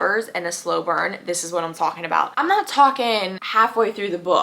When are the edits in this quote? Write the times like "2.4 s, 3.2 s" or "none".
2.3 s, 3.4 s